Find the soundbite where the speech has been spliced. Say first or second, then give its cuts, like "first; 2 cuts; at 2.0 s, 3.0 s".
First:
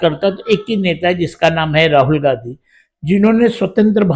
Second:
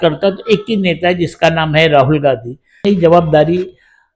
second; 1 cut; at 2.8 s